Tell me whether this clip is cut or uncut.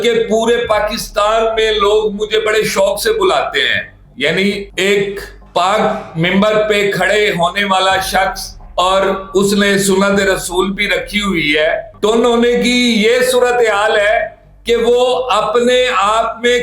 cut